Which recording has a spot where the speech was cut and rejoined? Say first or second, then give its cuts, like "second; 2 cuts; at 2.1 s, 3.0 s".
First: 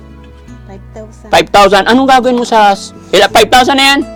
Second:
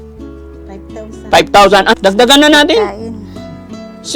second; 1 cut; at 1.9 s